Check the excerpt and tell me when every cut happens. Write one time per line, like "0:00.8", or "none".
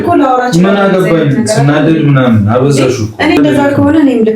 0:03.4